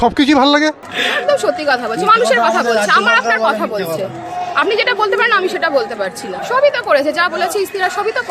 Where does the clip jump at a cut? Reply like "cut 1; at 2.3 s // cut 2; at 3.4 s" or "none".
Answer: cut 1; at 0.9 s // cut 2; at 6.3 s